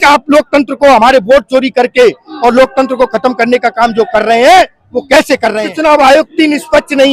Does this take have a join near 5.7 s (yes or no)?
yes